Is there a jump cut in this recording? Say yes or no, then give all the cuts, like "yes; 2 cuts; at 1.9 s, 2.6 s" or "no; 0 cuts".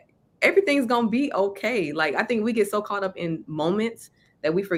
no; 0 cuts